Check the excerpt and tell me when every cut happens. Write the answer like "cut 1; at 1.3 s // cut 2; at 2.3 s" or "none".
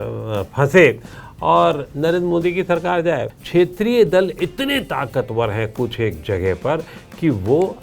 cut 1; at 3.3 s